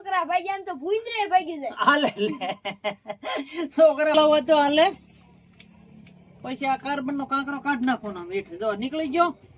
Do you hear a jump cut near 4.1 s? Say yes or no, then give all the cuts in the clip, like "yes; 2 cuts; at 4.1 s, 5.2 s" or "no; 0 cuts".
yes; 1 cut; at 4.1 s